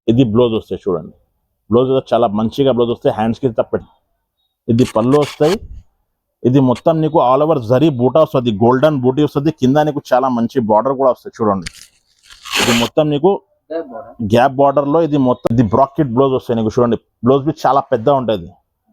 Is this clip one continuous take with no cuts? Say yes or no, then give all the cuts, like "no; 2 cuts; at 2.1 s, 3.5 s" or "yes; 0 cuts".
no; 2 cuts; at 3.9 s, 15.4 s